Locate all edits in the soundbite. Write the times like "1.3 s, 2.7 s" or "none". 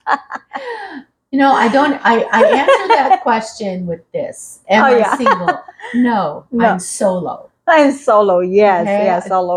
none

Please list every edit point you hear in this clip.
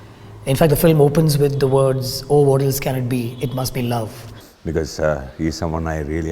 4.2 s

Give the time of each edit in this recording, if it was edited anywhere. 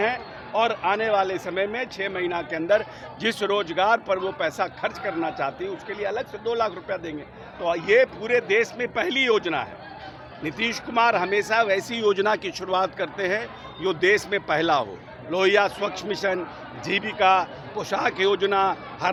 none

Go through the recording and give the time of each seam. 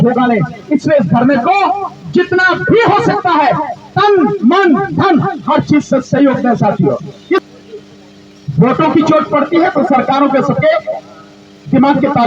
7.4 s

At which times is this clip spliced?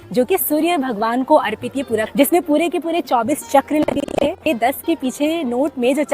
2.1 s, 4.5 s

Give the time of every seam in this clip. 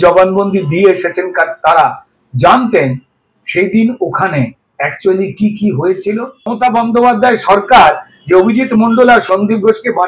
6.5 s

